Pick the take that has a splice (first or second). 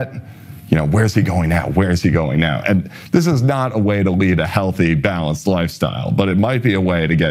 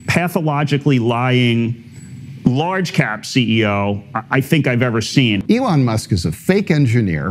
second